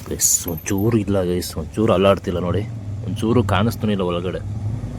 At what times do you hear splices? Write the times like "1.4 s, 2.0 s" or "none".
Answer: none